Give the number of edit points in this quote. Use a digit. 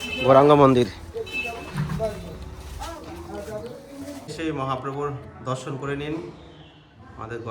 1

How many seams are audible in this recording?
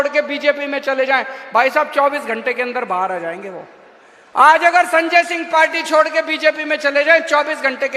0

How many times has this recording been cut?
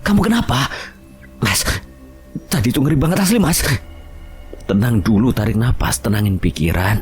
0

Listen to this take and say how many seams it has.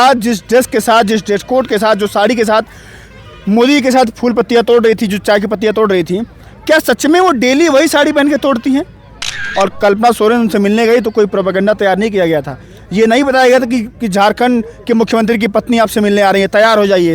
1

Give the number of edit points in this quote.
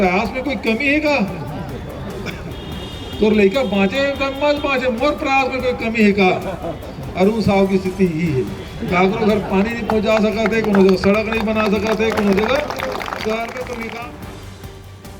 1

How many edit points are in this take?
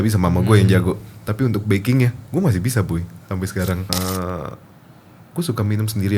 1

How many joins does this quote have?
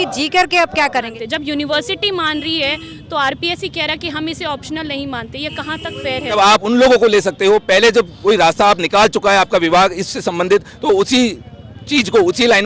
2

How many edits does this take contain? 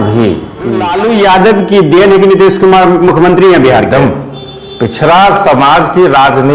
1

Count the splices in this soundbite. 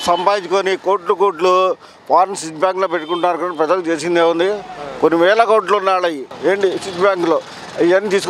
1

